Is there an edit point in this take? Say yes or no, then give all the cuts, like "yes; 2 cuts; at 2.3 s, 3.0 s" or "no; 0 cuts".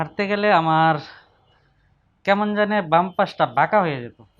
no; 0 cuts